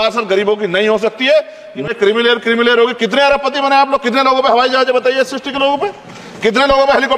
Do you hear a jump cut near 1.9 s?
yes; 1 cut; at 1.9 s

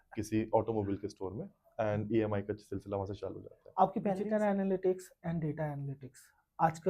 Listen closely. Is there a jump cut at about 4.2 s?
yes; 1 cut; at 4.2 s

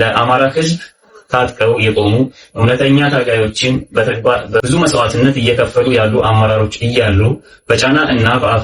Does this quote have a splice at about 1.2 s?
no; 1 cut; at 4.6 s

